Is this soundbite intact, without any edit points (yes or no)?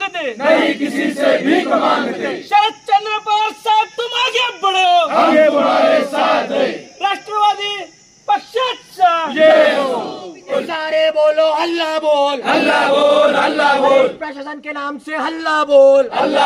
no